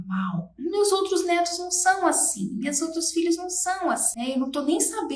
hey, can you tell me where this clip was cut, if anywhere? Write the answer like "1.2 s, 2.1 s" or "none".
4.1 s